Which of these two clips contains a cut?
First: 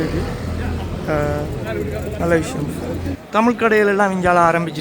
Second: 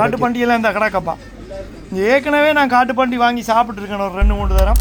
first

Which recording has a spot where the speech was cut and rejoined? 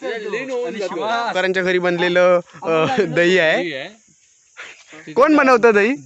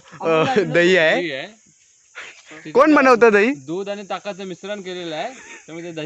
first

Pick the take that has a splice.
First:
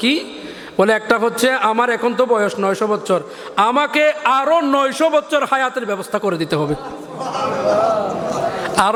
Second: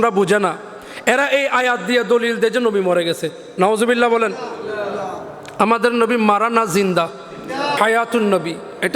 second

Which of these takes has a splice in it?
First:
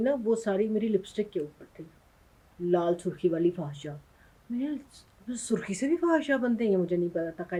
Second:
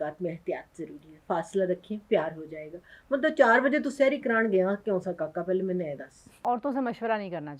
second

